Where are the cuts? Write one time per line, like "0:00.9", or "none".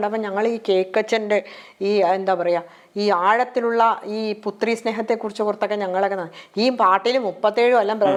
none